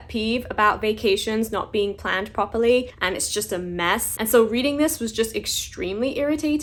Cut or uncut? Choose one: uncut